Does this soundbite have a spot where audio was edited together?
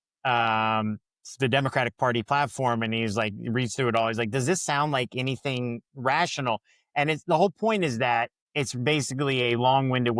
yes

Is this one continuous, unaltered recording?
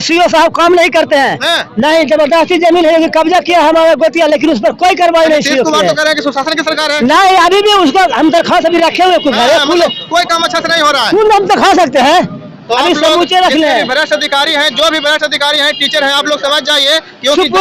yes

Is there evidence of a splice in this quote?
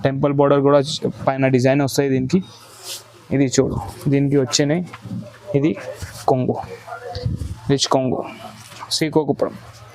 yes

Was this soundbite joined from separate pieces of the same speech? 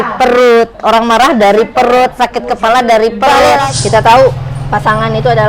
yes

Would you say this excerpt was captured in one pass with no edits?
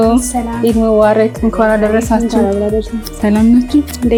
yes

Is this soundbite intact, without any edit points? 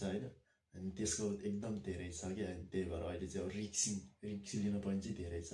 yes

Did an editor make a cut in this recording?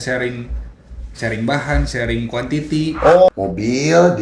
yes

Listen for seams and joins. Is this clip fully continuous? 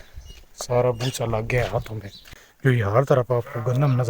no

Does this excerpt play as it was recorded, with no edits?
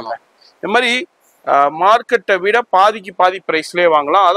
yes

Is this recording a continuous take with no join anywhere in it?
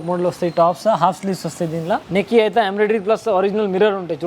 no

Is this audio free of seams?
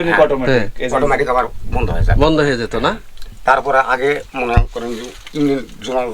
yes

